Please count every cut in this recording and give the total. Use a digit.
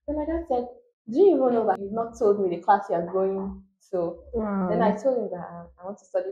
1